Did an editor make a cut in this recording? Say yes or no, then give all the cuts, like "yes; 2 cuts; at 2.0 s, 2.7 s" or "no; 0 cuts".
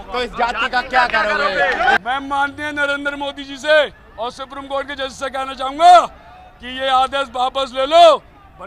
yes; 1 cut; at 2.0 s